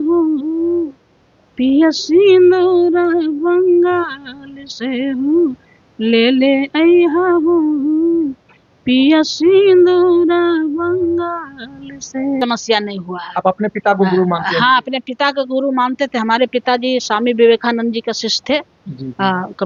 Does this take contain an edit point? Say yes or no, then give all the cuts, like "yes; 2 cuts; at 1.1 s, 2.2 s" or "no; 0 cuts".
no; 0 cuts